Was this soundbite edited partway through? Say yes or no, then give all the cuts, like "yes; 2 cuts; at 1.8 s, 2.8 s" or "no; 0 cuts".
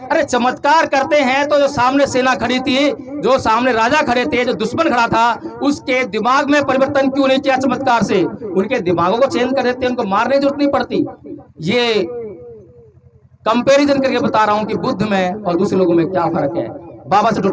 no; 0 cuts